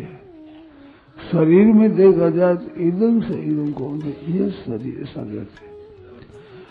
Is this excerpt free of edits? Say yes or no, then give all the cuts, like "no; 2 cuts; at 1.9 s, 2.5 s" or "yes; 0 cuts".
yes; 0 cuts